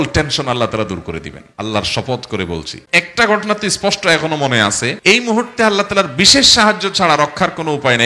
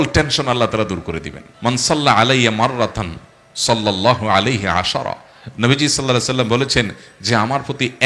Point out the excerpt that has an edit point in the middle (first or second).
first